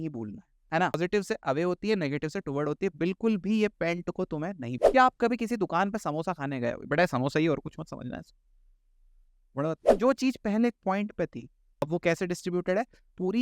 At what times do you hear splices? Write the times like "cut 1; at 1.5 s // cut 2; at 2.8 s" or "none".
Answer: cut 1; at 0.9 s // cut 2; at 4.8 s // cut 3; at 9.8 s // cut 4; at 11.8 s